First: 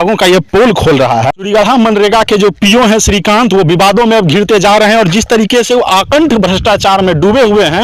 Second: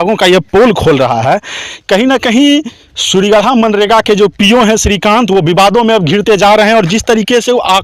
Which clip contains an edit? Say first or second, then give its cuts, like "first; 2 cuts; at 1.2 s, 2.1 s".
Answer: first; 1 cut; at 1.4 s